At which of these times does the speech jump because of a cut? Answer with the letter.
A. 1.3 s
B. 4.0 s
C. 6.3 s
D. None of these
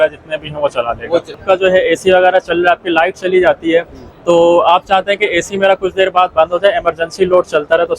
A